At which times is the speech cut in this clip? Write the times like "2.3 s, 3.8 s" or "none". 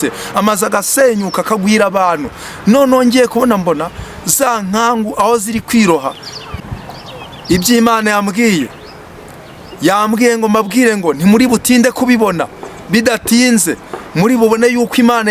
6.6 s